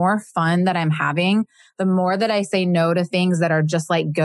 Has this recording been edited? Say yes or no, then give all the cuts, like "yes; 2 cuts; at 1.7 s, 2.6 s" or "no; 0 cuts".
no; 0 cuts